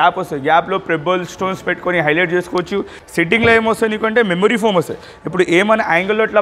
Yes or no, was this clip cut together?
yes